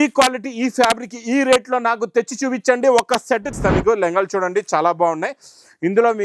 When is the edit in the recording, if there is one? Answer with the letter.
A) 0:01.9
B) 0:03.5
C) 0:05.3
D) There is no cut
B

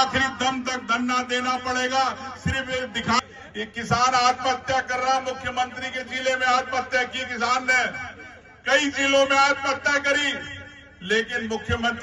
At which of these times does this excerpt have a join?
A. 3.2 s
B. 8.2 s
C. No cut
A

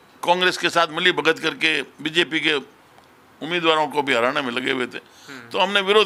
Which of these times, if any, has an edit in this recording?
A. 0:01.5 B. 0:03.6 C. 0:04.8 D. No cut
D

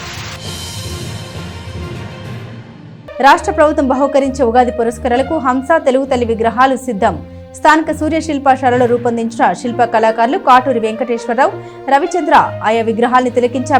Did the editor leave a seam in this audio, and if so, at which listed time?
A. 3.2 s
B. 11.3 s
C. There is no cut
A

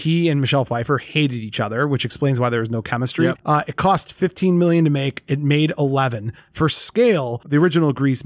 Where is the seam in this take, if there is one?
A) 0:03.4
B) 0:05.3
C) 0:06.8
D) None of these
A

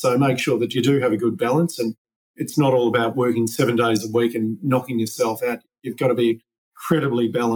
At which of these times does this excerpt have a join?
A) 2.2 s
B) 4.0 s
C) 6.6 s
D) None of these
D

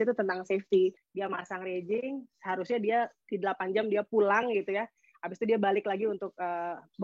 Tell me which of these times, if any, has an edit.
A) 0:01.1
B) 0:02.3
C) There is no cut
A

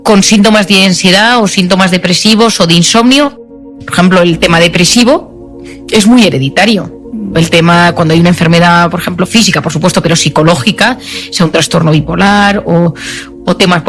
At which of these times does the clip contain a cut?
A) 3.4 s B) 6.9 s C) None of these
A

